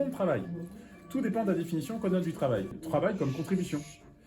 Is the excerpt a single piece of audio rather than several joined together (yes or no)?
no